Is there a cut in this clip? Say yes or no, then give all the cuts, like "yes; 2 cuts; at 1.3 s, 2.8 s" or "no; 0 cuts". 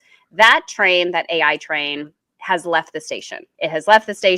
yes; 1 cut; at 3.4 s